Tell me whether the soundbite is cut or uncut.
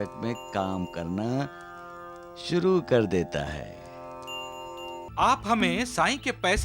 cut